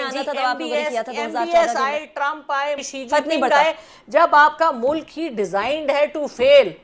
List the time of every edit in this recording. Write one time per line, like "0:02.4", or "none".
0:02.9